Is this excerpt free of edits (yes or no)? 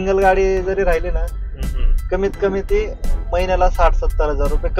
yes